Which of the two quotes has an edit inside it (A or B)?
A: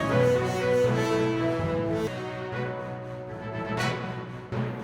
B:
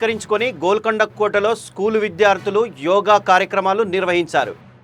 A